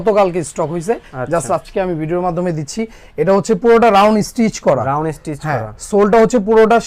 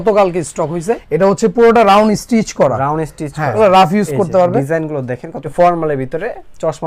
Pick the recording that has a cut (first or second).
second